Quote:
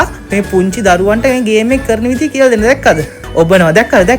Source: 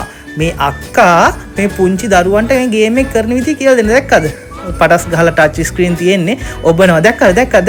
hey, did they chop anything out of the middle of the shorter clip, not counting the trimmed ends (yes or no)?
yes